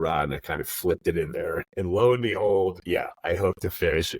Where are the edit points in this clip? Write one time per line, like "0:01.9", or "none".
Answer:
0:01.7
0:02.8